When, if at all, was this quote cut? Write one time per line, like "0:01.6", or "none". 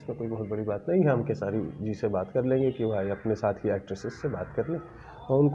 none